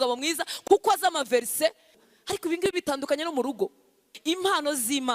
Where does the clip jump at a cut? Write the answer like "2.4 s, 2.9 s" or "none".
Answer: 1.9 s, 4.1 s

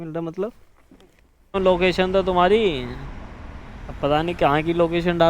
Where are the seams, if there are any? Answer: 1.6 s

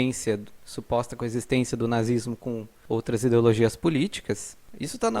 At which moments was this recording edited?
2.7 s

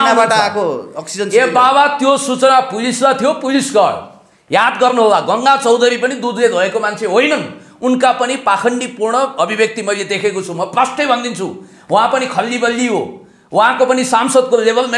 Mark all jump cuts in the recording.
none

